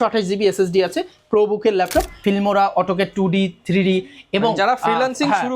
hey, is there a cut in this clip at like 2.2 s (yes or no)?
yes